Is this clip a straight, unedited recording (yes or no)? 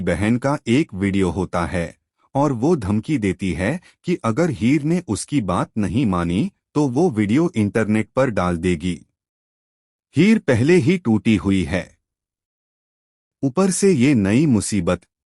yes